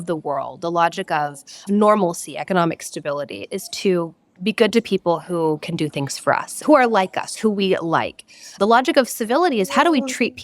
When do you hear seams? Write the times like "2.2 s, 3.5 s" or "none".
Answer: 1.6 s, 3.5 s, 8.4 s